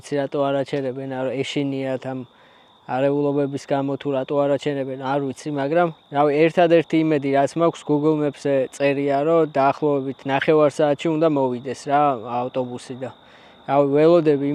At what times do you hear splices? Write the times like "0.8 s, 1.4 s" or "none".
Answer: none